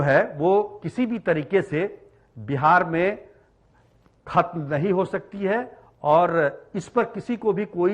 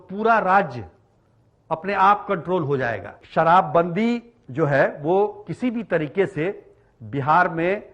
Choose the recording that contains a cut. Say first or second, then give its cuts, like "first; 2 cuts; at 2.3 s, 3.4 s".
second; 1 cut; at 3.2 s